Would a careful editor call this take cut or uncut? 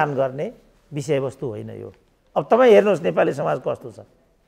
uncut